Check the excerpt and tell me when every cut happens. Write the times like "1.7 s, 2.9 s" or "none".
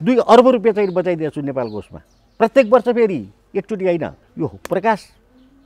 4.2 s

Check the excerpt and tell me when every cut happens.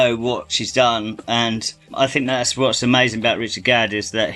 none

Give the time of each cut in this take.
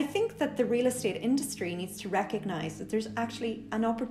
none

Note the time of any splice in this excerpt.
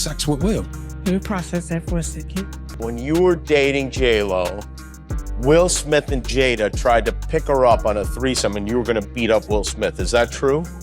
2.7 s

